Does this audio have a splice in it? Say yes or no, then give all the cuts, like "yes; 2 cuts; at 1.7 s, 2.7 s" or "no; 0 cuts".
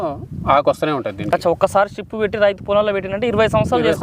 no; 0 cuts